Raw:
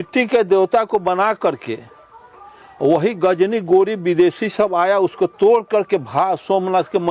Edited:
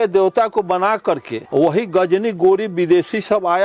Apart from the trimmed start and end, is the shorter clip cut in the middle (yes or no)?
yes